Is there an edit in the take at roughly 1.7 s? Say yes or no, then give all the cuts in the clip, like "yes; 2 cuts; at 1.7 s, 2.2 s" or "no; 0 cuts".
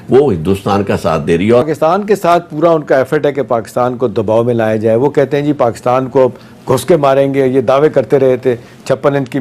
yes; 1 cut; at 1.7 s